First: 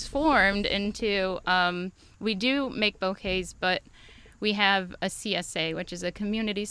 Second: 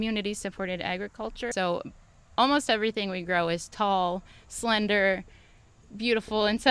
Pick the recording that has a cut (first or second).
second